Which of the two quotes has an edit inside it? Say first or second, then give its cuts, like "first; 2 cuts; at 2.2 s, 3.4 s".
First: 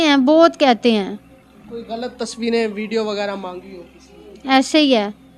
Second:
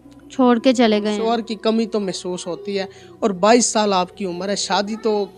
second; 1 cut; at 1.3 s